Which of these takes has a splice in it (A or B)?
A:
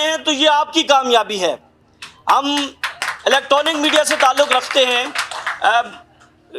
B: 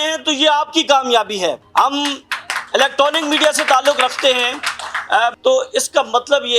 B